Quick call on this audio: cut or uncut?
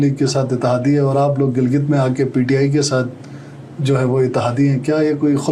uncut